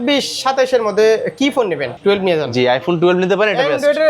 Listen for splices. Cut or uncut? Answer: cut